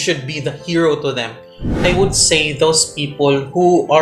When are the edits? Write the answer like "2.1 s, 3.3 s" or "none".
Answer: 1.8 s